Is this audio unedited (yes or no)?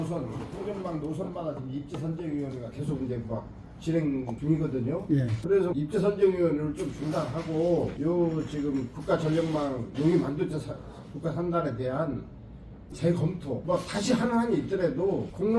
no